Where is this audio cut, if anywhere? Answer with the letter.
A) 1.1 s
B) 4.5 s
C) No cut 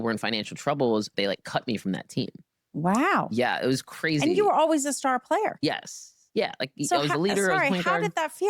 A